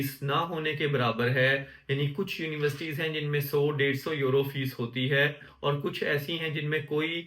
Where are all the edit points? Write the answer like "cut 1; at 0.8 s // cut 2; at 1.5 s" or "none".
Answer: none